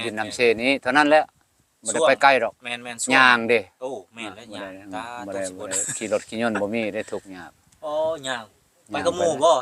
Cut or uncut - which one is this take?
uncut